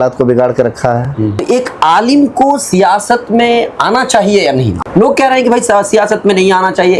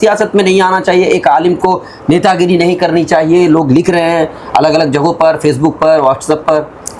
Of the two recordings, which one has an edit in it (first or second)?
first